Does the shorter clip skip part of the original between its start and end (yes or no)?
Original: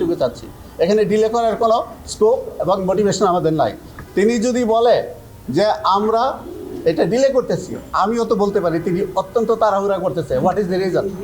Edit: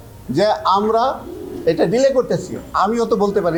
no